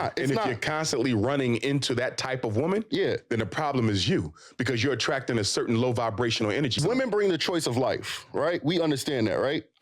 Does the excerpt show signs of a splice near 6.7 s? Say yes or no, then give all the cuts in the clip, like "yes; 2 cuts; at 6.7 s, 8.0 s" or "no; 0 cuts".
yes; 1 cut; at 6.7 s